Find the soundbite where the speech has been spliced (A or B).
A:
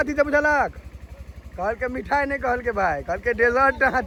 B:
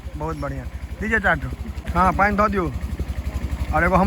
B